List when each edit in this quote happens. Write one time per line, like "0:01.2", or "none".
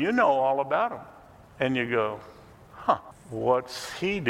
0:03.2